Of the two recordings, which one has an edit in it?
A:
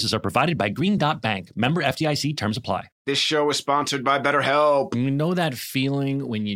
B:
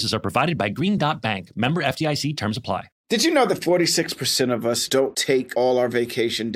B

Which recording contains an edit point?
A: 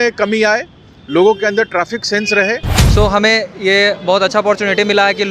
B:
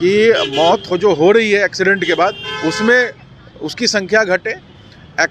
A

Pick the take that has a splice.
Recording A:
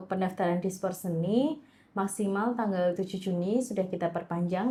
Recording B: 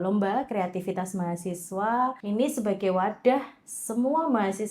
B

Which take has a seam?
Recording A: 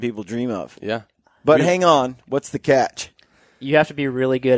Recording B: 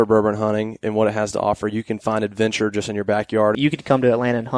B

